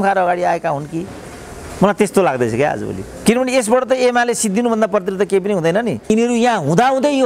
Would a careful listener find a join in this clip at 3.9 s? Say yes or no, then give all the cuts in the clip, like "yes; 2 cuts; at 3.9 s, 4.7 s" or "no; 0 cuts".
no; 1 cut; at 6.1 s